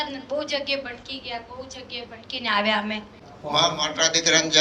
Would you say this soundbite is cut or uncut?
cut